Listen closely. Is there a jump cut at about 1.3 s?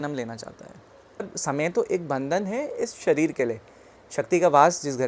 yes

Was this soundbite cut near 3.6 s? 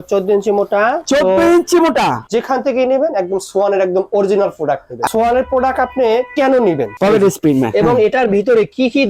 no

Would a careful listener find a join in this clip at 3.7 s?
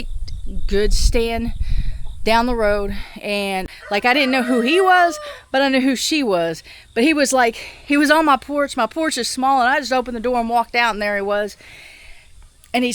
yes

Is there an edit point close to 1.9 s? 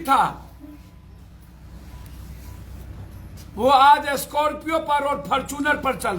no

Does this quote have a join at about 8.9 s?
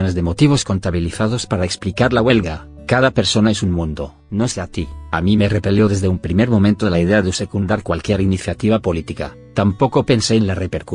no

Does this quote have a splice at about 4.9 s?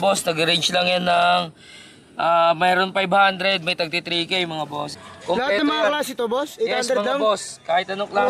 yes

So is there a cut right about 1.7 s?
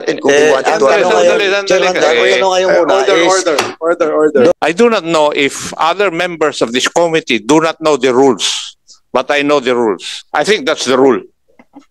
no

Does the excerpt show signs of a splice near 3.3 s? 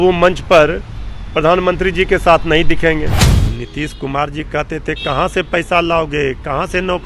yes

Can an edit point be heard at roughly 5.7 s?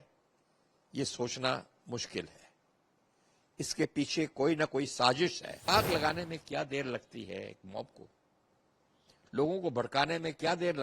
yes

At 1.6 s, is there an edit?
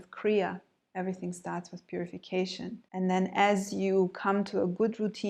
no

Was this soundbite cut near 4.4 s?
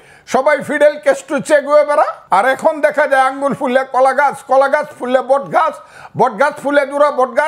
no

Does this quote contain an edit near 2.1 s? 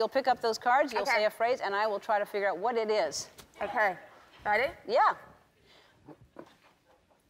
yes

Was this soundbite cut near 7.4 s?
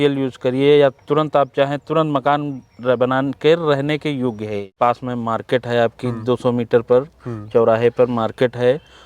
no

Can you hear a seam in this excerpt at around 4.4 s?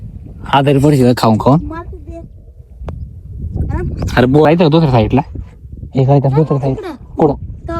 yes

